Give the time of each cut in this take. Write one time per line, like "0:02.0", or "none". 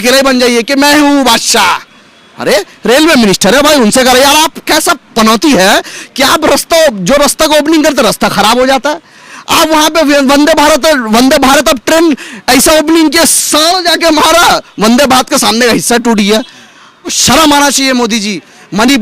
0:17.2

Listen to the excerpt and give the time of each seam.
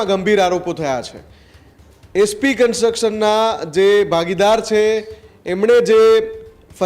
none

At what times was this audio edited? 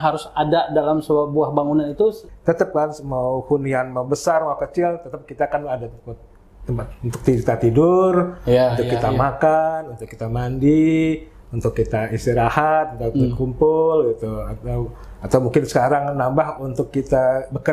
0:02.3

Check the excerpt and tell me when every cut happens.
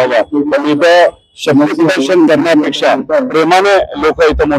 none

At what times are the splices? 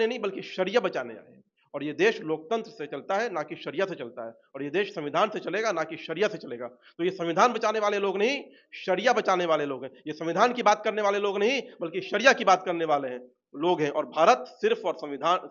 none

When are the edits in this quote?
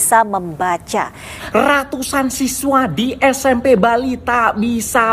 0:01.2

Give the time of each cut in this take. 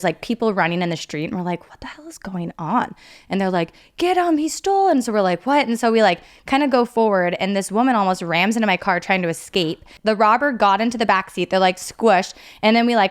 0:03.1
0:09.9

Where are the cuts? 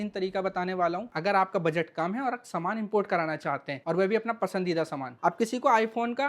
0:01.1
0:05.1

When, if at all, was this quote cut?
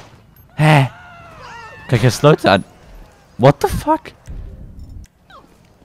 0:04.1

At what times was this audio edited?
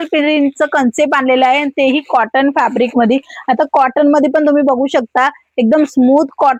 none

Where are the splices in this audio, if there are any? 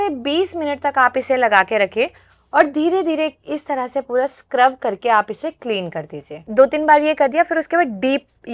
0:06.4

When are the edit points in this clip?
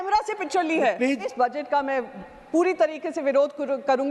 0:01.3

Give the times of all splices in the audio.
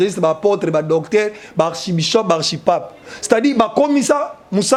none

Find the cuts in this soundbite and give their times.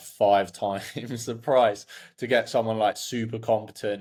none

